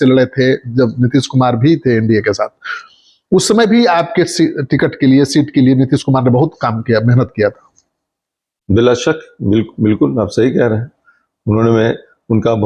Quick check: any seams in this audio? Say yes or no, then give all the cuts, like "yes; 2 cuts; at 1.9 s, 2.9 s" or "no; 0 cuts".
no; 0 cuts